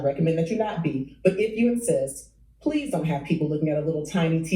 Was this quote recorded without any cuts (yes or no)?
yes